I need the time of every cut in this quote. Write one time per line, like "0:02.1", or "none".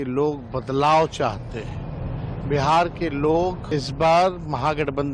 0:03.6